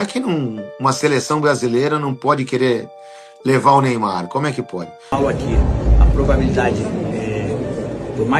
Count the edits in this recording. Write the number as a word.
one